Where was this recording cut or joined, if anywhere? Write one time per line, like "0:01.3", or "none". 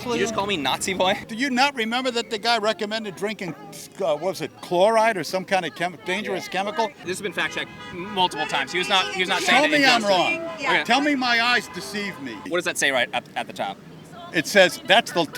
0:01.2
0:07.0
0:12.4